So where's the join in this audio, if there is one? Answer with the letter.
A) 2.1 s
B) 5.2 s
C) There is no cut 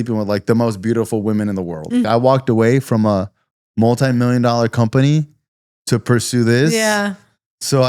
A